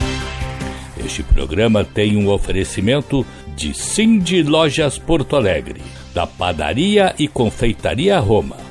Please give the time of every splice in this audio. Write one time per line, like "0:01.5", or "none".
0:01.0